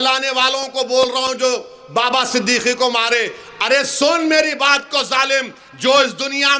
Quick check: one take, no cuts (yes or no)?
yes